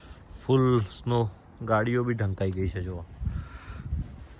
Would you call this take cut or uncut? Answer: uncut